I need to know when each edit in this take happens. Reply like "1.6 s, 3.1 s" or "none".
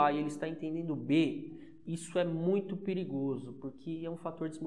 none